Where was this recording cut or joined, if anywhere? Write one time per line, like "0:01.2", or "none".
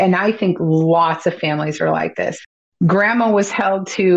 0:02.4

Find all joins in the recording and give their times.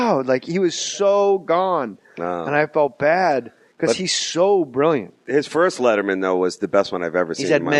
0:04.3

